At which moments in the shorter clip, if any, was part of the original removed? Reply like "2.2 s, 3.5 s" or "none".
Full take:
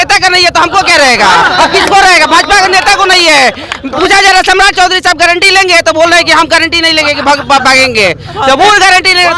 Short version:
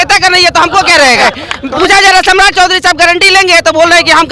1.2 s